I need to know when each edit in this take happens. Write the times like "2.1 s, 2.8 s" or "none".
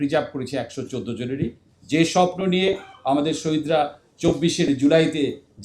1.7 s, 4.0 s